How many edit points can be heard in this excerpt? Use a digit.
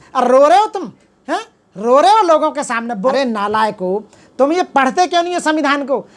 1